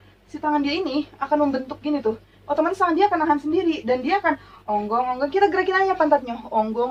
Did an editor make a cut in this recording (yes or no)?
no